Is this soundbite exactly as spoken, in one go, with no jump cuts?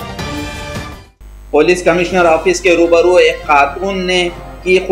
no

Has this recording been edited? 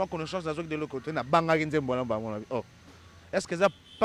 no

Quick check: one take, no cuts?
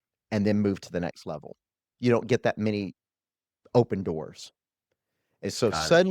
no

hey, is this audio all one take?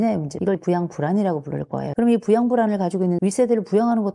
no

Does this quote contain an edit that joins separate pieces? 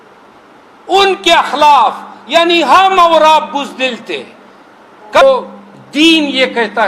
yes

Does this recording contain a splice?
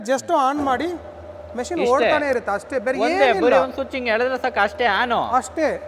no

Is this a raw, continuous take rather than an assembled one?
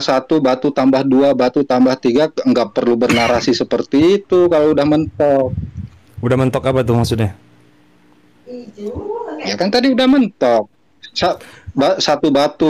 yes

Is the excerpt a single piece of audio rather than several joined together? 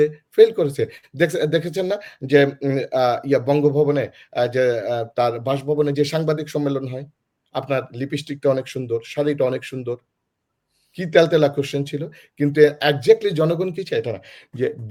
yes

